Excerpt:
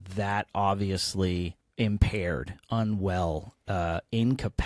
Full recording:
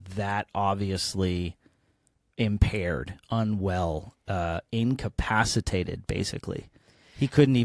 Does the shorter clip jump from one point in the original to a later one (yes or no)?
yes